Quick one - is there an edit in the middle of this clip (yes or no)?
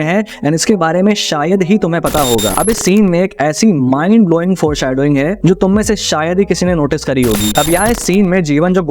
yes